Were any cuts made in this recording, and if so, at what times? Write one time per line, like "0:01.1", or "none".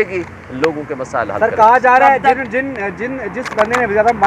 none